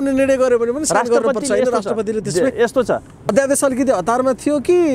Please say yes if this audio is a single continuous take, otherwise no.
no